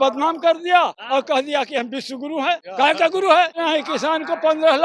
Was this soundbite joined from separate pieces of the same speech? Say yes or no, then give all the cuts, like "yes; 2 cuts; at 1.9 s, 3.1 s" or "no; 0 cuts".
yes; 3 cuts; at 1.0 s, 2.7 s, 3.5 s